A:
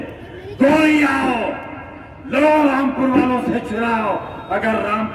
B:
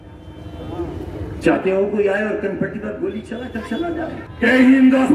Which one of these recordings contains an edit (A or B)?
B